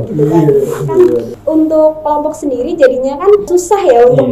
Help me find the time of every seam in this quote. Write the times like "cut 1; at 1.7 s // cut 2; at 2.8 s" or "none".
cut 1; at 1.3 s // cut 2; at 3.5 s